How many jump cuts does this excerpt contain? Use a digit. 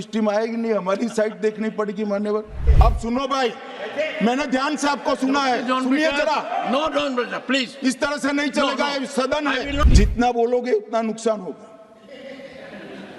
2